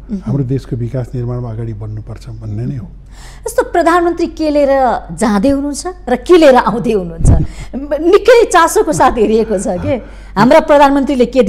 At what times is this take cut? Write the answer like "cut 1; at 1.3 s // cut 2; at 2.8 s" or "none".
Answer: none